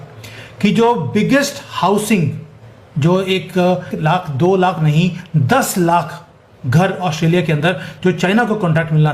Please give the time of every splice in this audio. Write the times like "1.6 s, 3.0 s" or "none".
3.9 s